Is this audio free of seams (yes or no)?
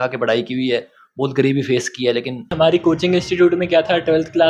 no